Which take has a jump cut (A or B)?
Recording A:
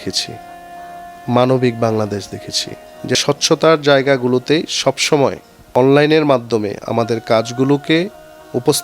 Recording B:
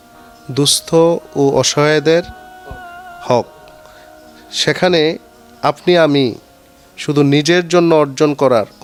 A